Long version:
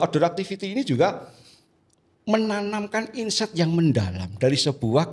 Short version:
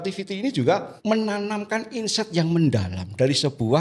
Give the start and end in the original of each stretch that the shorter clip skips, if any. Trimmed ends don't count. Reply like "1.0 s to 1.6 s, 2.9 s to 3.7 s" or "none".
1.2 s to 2.1 s